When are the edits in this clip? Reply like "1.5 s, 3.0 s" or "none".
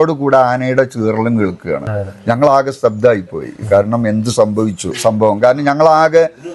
1.9 s, 5.0 s